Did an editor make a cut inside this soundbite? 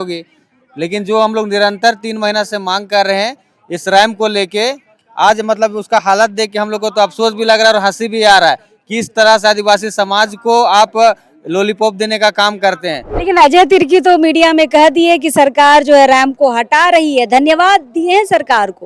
yes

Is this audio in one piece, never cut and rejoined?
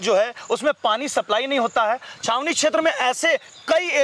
yes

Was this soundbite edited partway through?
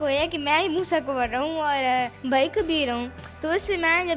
yes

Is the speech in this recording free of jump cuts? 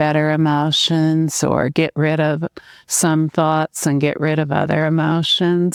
yes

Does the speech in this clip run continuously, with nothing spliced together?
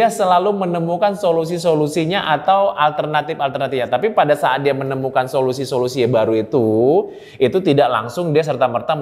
yes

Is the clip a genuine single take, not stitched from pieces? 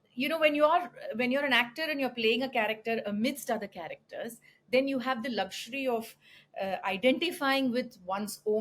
yes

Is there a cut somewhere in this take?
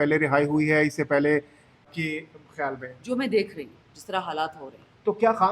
yes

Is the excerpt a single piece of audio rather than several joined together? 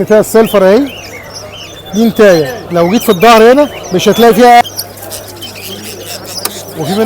no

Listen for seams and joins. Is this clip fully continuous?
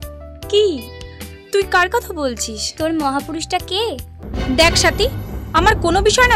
no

